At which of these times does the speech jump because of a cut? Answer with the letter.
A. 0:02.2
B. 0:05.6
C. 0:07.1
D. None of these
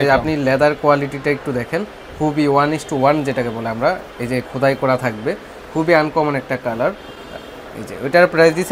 D